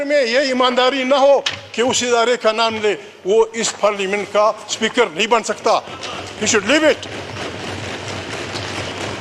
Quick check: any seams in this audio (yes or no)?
no